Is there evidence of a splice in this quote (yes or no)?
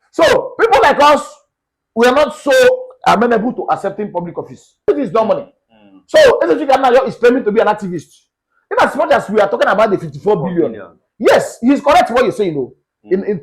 yes